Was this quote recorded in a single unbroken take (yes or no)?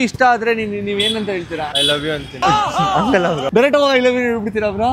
no